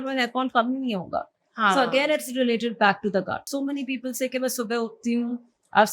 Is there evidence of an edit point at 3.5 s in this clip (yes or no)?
yes